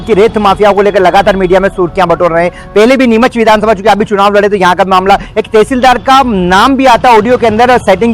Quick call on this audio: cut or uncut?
uncut